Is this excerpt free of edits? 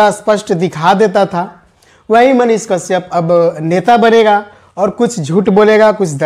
yes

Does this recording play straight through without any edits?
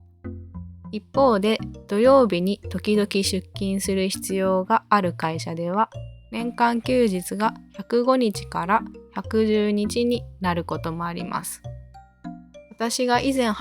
no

